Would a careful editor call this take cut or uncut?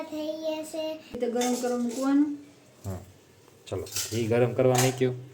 cut